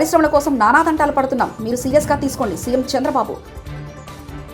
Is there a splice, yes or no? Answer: no